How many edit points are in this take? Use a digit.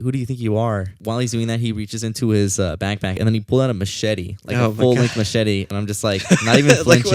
3